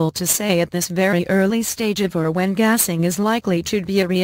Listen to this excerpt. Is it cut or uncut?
uncut